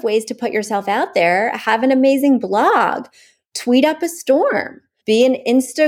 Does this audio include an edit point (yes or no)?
no